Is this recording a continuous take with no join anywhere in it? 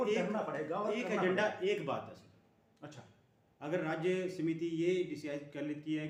yes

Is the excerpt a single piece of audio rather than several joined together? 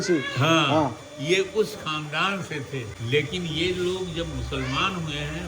no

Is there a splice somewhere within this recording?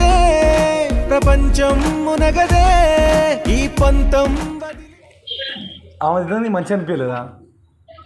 no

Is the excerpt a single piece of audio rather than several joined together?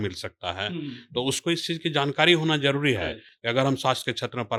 yes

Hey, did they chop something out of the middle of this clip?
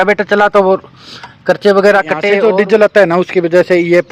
yes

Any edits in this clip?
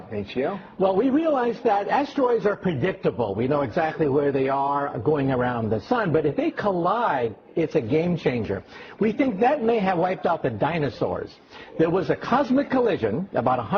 no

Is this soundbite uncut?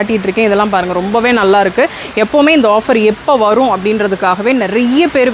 yes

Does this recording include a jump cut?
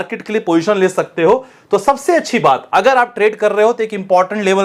no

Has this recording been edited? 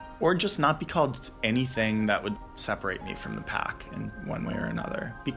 no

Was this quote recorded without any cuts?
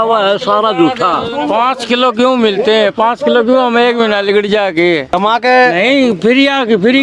no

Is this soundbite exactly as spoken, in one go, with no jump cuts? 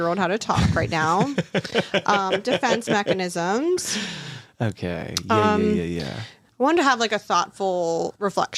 yes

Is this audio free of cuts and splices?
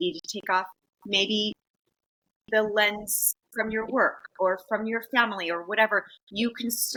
yes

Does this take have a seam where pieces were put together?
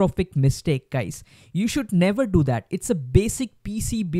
no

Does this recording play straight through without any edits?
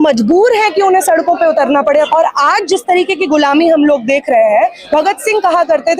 no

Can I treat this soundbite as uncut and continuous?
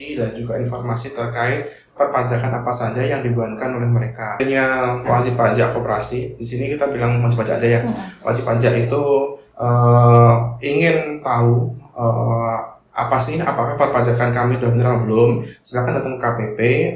no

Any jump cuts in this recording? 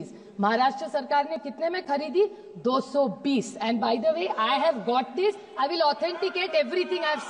no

